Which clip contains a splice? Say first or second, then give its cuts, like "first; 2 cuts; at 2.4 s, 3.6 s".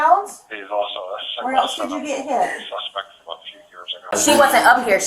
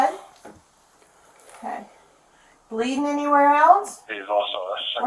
first; 1 cut; at 4.1 s